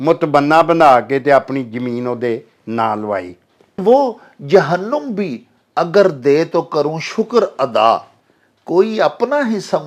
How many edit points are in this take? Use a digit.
1